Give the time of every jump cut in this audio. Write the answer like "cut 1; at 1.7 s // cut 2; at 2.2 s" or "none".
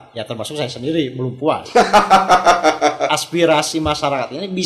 cut 1; at 3.1 s

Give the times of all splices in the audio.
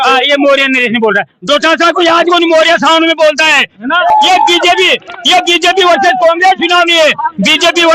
cut 1; at 4.1 s

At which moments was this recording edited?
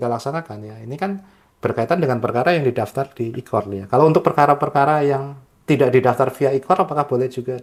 none

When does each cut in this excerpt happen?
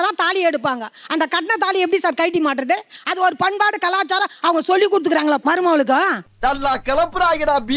none

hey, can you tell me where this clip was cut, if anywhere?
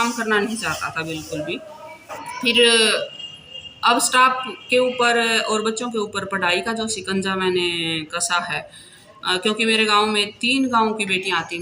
cut 1; at 2.2 s

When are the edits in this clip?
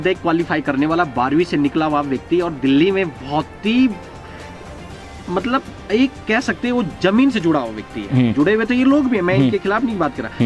none

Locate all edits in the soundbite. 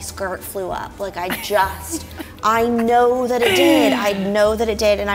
none

